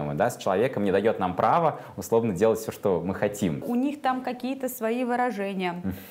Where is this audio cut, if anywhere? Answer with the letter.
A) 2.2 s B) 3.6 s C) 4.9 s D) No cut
B